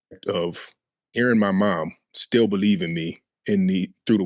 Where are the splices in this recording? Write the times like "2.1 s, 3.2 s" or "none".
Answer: 1.2 s